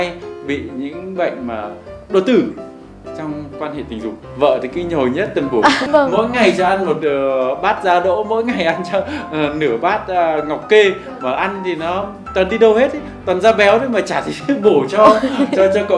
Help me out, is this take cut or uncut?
cut